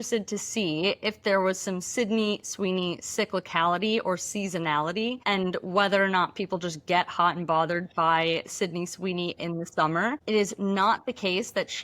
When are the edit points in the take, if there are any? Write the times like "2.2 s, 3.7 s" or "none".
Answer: 5.2 s, 10.2 s